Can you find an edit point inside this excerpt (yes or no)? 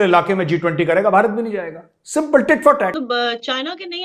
yes